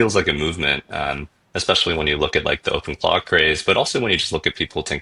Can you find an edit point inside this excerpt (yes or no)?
no